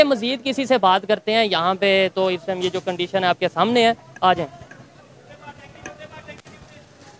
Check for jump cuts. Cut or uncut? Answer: uncut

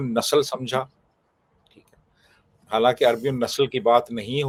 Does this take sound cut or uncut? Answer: uncut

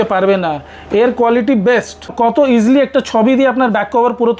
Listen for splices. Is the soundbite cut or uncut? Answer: cut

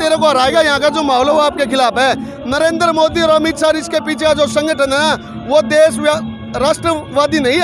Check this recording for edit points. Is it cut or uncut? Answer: uncut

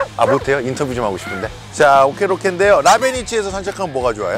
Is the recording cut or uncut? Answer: uncut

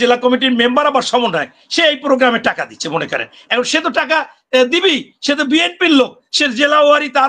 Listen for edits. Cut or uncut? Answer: uncut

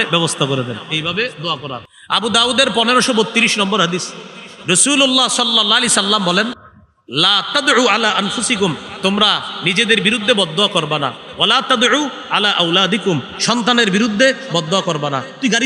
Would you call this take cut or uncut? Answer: cut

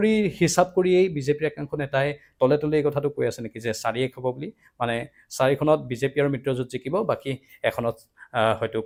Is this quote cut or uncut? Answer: uncut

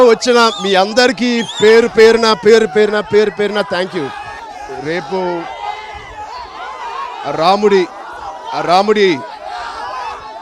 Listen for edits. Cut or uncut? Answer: cut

